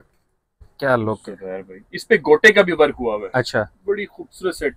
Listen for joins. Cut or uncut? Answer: uncut